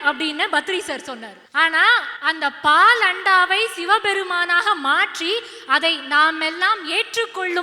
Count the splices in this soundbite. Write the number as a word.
two